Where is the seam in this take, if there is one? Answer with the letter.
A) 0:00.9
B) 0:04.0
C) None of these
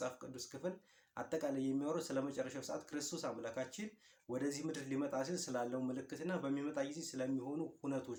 C